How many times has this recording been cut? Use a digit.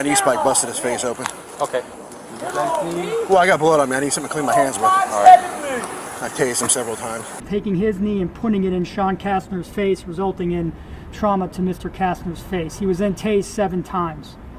2